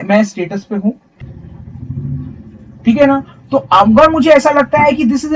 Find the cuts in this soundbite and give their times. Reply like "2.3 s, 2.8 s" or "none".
1.1 s